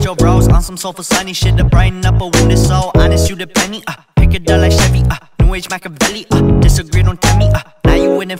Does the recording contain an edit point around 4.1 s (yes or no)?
no